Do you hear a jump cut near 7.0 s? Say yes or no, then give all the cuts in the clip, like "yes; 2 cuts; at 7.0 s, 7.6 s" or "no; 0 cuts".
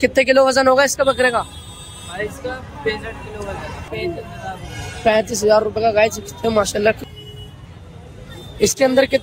yes; 2 cuts; at 3.8 s, 7.0 s